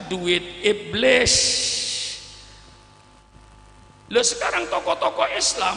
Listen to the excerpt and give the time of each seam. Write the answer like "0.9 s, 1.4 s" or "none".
3.3 s